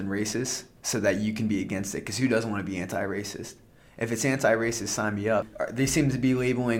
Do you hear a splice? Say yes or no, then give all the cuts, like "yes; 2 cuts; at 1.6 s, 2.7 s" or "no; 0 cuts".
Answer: yes; 1 cut; at 5.5 s